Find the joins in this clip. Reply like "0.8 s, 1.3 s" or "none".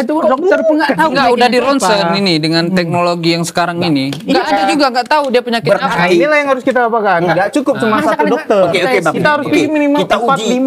none